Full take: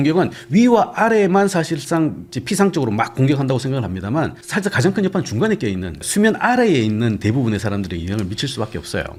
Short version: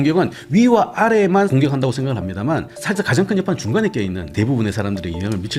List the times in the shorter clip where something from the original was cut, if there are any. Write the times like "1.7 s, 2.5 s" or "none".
1.5 s, 4.3 s